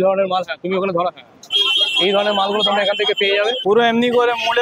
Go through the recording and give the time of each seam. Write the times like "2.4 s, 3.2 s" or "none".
3.6 s